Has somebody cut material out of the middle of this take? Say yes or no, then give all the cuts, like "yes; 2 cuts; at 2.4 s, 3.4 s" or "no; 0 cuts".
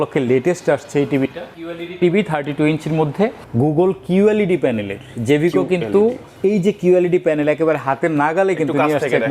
yes; 2 cuts; at 1.6 s, 3.4 s